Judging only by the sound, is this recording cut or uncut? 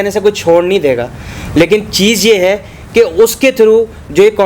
uncut